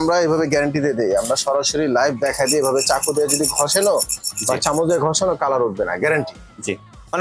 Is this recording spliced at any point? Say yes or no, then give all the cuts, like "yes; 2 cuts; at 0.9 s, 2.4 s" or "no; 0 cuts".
no; 0 cuts